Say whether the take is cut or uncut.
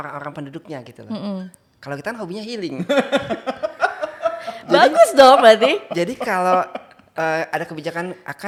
uncut